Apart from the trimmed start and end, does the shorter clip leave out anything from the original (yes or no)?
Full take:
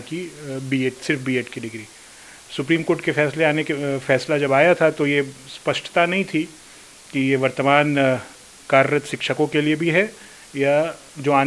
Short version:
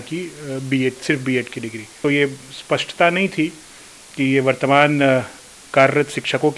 yes